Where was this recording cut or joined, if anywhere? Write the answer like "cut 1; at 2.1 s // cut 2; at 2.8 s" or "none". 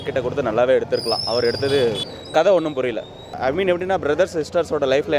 cut 1; at 2.2 s // cut 2; at 3.2 s